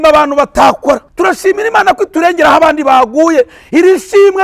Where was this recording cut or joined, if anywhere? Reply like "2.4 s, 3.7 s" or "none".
1.1 s